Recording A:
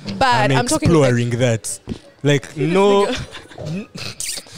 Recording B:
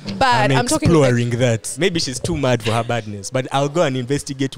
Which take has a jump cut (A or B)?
B